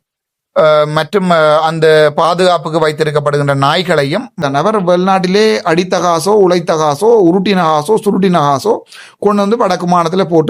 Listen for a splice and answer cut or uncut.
cut